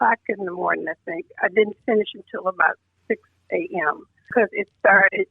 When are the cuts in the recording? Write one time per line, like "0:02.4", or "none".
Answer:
0:04.3